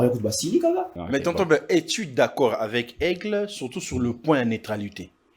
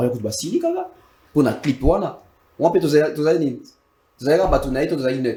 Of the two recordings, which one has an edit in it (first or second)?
first